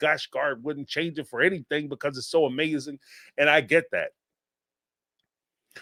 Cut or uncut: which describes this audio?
uncut